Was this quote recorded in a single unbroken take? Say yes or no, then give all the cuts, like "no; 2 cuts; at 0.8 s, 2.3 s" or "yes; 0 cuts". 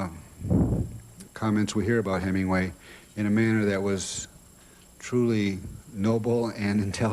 yes; 0 cuts